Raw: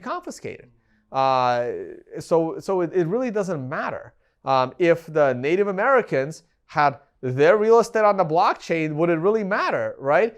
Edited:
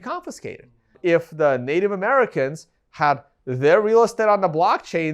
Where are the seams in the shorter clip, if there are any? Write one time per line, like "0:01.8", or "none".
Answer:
0:01.0